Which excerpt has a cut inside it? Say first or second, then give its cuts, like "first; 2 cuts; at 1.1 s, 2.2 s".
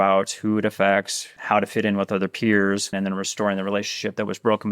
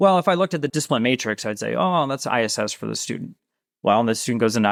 first; 2 cuts; at 1.2 s, 2.9 s